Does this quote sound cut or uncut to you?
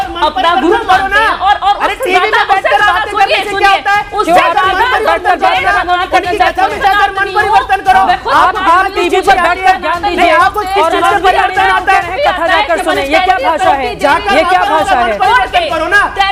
uncut